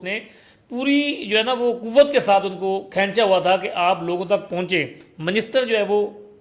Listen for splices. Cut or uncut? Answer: uncut